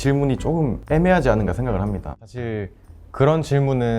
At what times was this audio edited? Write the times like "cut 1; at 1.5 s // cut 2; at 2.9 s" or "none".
cut 1; at 0.8 s // cut 2; at 2.1 s